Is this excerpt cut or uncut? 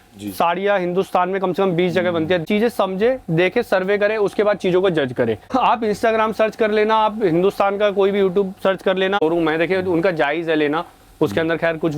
cut